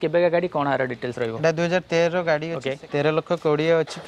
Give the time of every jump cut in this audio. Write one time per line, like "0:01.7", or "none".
0:02.7